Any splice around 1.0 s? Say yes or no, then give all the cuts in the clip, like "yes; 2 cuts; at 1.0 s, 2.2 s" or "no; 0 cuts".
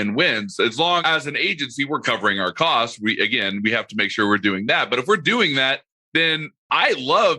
yes; 2 cuts; at 1.0 s, 6.3 s